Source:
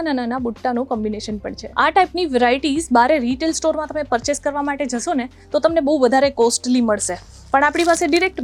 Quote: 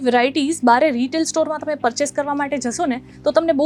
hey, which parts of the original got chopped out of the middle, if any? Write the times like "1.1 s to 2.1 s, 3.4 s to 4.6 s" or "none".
none